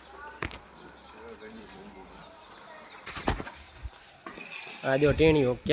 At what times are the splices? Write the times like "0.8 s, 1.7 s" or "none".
3.0 s